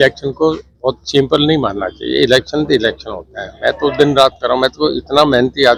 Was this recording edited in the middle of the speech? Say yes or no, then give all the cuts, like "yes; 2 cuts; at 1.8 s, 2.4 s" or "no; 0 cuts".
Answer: no; 0 cuts